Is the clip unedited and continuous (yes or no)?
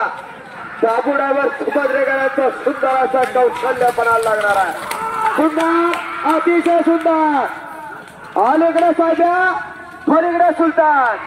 yes